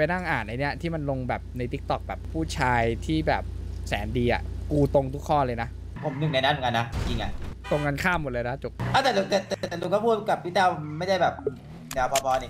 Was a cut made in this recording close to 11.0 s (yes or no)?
no